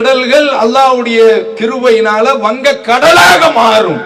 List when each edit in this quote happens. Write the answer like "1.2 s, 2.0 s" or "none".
none

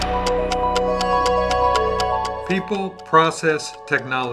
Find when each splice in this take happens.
2.4 s

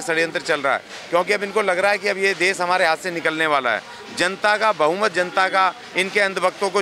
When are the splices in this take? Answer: none

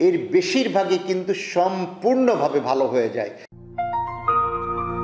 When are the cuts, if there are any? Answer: 3.4 s

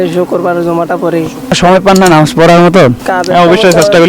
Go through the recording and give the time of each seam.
1.6 s, 3.0 s

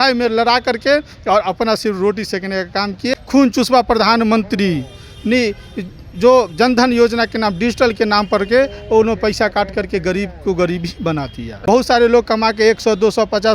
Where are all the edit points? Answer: 3.1 s, 11.5 s

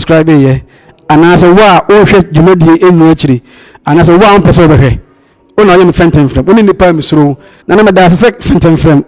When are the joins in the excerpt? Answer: 7.5 s

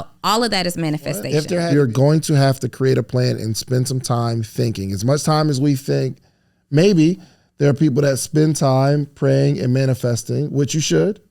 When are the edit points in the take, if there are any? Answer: 1.6 s

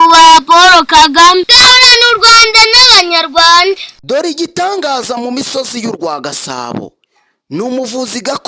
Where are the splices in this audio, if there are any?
1.5 s, 3.9 s

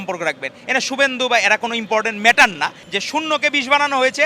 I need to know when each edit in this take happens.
2.8 s

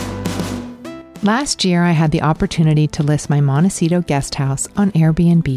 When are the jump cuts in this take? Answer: 1.1 s

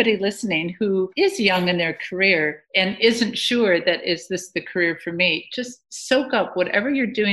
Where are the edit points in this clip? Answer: 2.6 s

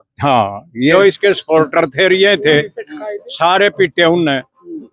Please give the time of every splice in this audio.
0.9 s

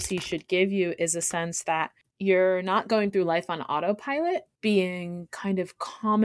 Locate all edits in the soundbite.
2.0 s, 4.5 s

